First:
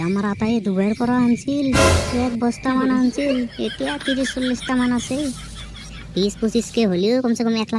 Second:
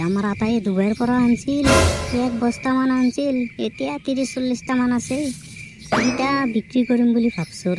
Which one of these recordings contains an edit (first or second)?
first